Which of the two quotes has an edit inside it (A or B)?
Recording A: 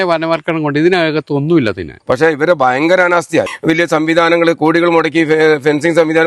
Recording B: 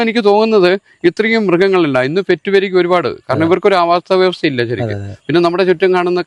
A